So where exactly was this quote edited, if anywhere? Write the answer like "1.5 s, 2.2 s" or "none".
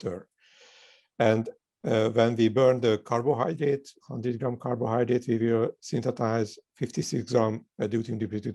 none